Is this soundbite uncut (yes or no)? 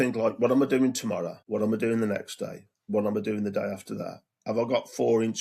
no